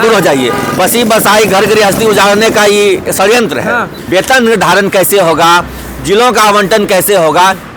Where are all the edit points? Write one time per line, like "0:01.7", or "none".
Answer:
0:04.0